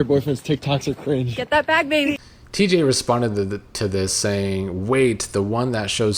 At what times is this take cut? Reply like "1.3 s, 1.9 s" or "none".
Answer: 2.2 s